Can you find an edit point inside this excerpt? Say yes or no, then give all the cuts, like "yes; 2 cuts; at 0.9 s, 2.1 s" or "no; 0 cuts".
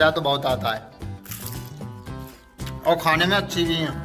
no; 0 cuts